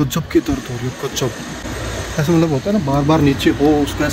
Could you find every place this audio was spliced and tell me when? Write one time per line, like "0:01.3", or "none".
none